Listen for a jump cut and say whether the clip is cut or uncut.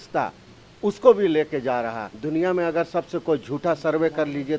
cut